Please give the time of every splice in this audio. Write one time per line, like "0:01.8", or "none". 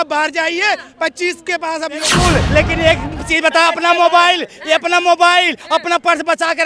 0:02.1